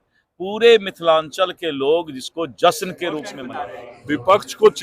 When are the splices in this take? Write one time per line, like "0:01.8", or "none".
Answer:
0:03.4